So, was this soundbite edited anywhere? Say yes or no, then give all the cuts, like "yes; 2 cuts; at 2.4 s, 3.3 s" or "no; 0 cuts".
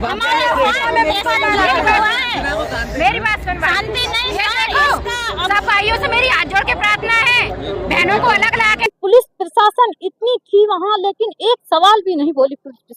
yes; 1 cut; at 8.9 s